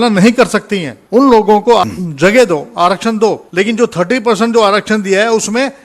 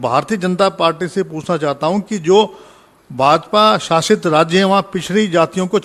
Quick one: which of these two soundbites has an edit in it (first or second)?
first